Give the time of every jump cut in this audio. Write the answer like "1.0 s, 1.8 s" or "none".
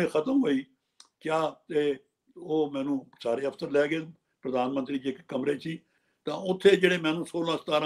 6.0 s